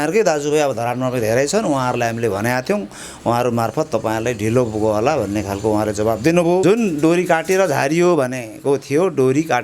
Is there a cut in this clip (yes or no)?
yes